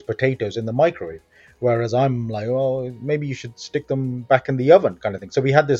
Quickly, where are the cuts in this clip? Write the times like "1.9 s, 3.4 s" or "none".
none